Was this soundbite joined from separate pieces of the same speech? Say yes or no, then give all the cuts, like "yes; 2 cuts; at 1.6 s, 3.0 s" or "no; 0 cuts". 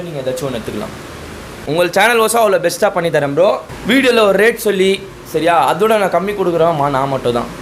yes; 1 cut; at 3.7 s